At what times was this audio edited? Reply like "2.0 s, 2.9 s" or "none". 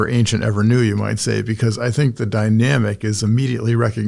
none